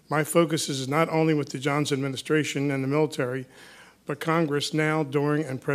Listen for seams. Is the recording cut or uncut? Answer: cut